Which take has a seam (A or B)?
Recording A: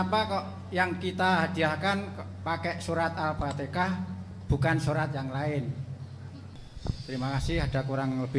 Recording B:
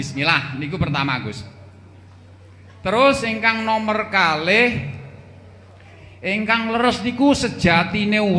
A